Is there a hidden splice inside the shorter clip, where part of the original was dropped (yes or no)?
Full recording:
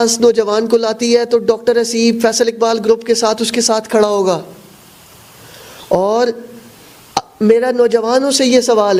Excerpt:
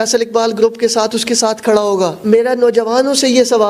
yes